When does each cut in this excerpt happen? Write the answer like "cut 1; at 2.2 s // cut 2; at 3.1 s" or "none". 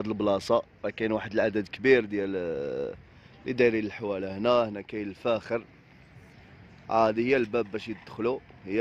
none